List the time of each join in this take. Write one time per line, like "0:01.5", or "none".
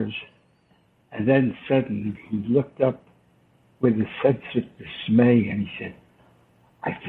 none